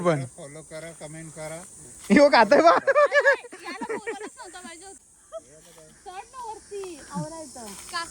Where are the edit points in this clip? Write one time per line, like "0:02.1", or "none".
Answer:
0:04.9

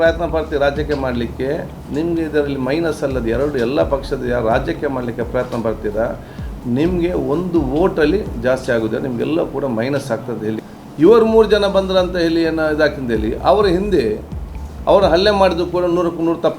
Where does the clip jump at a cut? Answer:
0:10.6

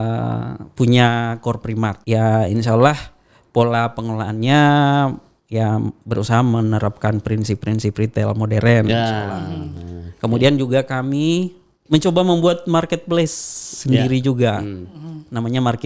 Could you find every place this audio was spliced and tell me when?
0:02.0

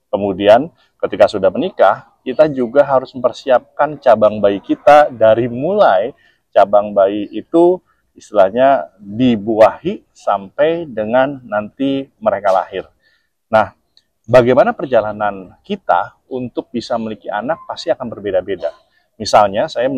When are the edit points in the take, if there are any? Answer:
none

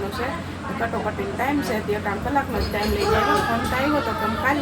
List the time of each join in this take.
none

